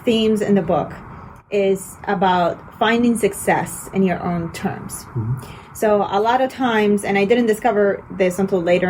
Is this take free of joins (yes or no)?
yes